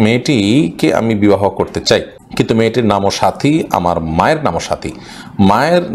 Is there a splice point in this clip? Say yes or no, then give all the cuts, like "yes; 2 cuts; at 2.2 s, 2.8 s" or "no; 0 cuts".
yes; 1 cut; at 2.2 s